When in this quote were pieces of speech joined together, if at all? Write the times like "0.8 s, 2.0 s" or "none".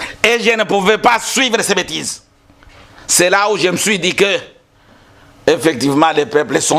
none